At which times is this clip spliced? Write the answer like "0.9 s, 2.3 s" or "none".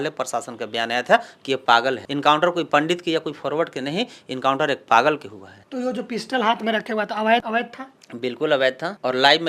2.0 s